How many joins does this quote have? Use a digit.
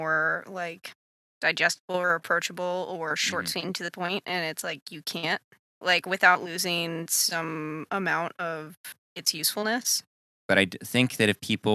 2